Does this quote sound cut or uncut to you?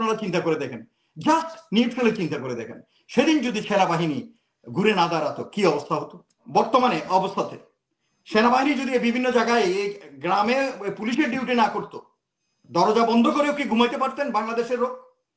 cut